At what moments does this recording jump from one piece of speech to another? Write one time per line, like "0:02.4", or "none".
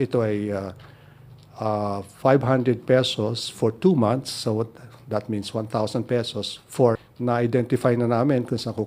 0:07.1